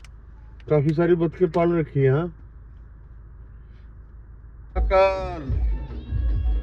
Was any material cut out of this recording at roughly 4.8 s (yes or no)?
yes